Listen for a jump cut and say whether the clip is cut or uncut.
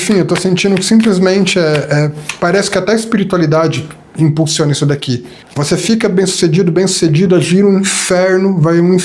cut